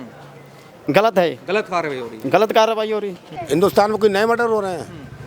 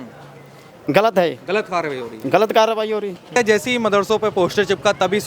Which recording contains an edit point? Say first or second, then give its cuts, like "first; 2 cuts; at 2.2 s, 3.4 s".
first; 1 cut; at 3.2 s